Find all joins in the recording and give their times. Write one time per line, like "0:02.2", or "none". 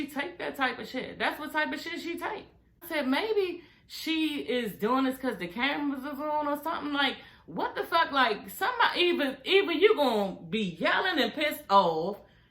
0:02.9

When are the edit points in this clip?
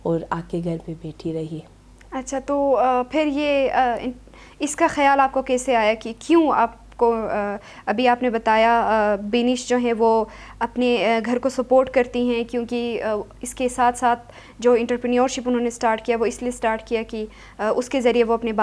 none

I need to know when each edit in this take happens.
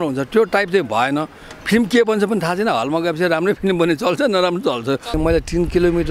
0:05.1

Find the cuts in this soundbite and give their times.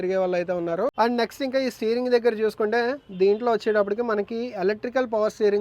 0:00.9

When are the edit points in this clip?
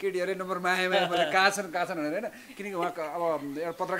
none

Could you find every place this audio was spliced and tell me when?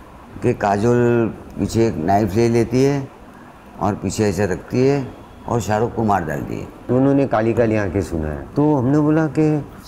0:06.9

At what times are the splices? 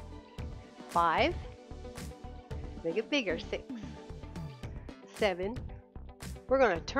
0:00.9
0:01.3
0:02.8
0:03.6
0:05.1

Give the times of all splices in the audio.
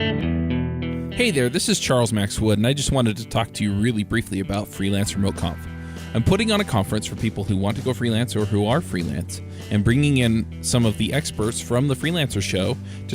0:01.1

